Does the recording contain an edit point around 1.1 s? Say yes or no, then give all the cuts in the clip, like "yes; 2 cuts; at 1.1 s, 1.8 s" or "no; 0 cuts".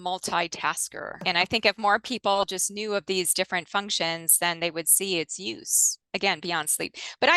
yes; 1 cut; at 1.1 s